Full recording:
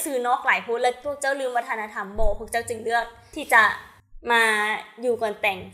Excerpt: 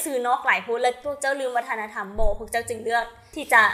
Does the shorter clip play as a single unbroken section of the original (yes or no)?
yes